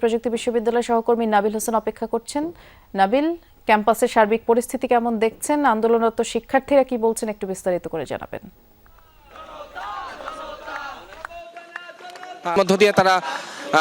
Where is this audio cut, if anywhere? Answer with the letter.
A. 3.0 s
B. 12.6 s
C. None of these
B